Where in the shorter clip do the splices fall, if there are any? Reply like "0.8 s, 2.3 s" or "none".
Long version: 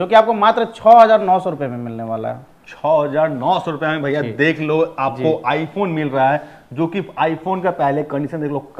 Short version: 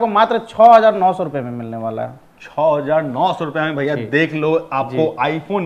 none

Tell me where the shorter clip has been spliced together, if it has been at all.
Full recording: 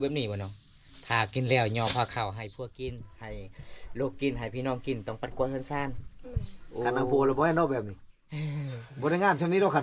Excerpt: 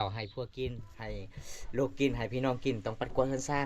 none

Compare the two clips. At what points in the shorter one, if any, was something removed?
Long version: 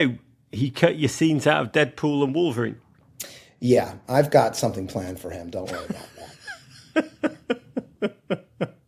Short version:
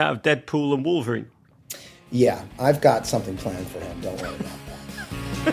none

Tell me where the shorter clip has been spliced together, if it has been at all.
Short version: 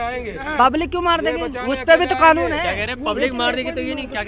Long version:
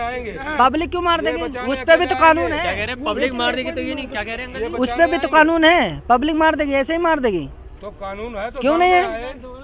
none

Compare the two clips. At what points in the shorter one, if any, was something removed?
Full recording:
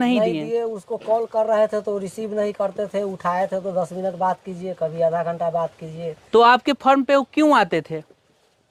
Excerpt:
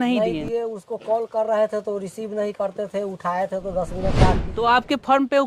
4.5 s

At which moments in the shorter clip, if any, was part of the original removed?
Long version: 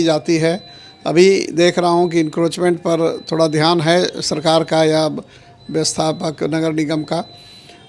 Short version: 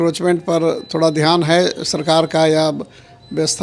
none

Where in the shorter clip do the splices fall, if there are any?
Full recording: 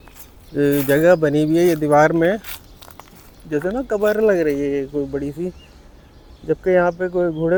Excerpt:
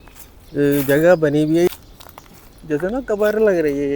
1.7 s

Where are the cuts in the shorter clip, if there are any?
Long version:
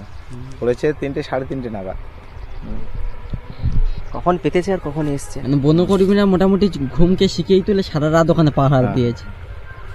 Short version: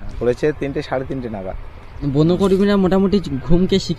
2.0 s

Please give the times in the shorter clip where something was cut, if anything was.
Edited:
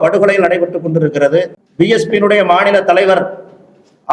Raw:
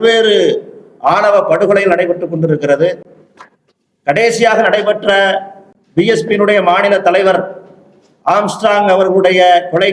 1.6 s

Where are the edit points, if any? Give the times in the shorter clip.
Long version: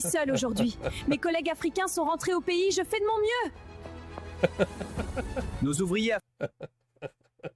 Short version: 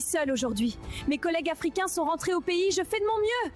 none

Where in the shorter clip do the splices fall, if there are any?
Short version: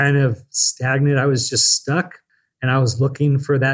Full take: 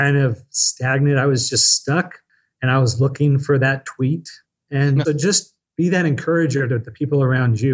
none

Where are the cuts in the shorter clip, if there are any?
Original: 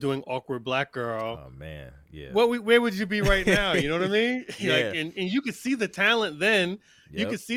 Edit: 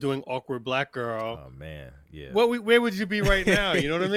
none

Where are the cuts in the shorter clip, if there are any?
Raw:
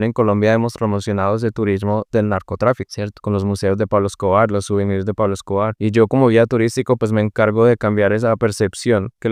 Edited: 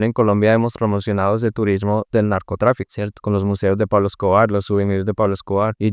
none

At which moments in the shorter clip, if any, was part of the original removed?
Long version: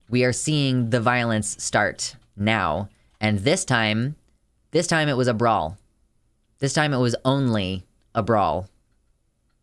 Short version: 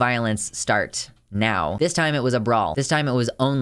1.7 s, 2.7 s

